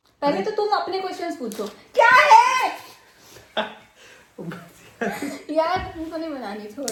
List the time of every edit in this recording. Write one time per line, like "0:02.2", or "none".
none